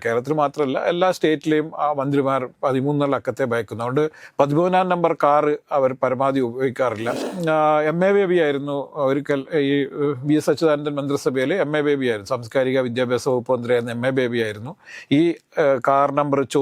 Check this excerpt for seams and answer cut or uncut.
cut